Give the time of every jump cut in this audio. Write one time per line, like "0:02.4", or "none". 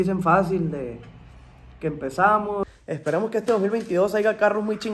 0:02.6